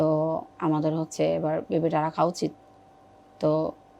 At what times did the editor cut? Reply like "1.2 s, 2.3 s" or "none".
none